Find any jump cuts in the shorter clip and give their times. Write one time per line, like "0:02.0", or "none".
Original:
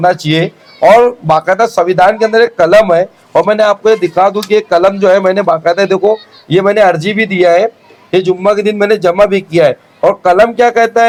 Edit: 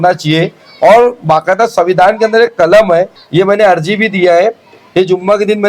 0:03.2